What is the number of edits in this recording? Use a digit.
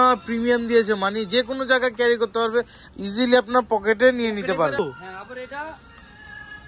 1